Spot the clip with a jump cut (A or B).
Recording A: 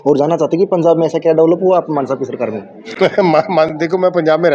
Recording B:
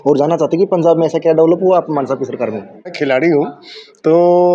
B